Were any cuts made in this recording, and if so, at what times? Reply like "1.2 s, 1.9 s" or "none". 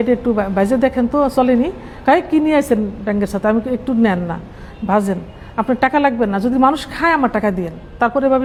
none